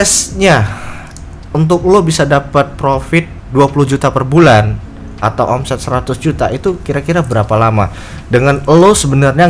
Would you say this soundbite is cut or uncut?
uncut